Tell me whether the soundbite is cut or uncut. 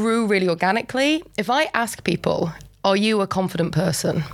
cut